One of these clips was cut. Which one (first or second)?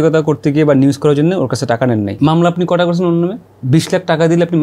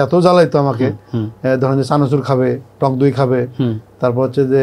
first